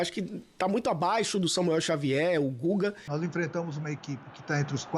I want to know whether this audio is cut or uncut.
cut